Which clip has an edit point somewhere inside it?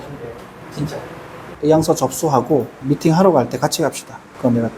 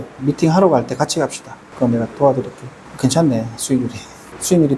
first; 1 cut; at 1.5 s

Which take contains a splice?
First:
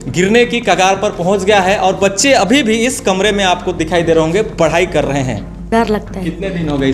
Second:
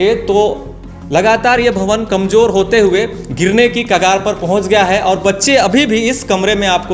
first; 1 cut; at 5.7 s

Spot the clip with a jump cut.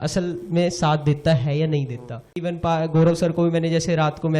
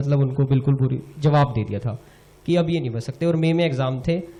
first; 1 cut; at 2.4 s

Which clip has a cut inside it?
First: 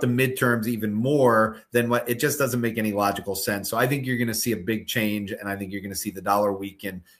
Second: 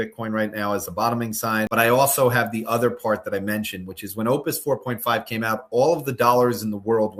second; 1 cut; at 1.7 s

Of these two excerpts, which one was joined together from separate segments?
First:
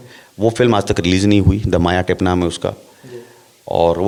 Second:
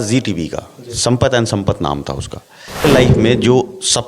second; 1 cut; at 2.8 s

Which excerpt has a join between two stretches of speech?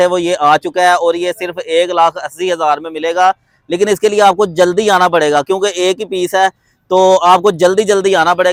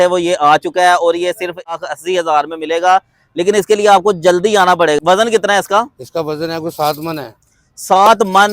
second; 2 cuts; at 1.7 s, 5.0 s

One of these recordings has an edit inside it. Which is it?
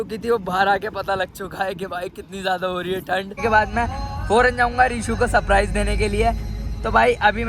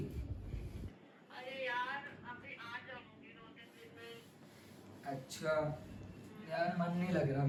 first; 1 cut; at 3.4 s

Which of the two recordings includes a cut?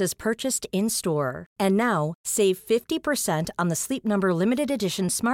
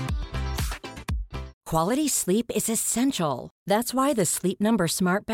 second; 1 cut; at 1.5 s

